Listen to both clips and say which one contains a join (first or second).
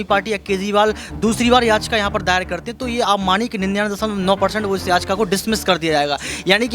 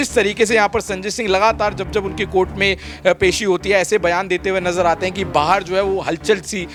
first